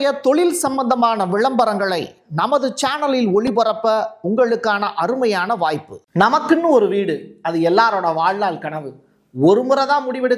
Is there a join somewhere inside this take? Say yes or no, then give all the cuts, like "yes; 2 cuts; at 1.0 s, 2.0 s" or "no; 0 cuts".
yes; 1 cut; at 6.0 s